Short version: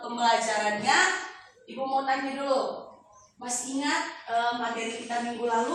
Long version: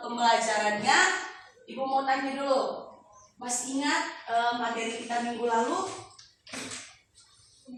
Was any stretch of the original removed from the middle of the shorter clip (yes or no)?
no